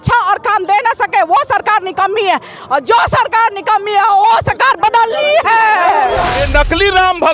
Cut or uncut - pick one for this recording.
cut